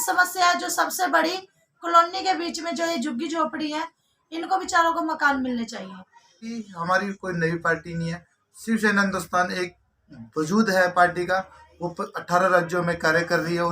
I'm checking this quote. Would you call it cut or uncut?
cut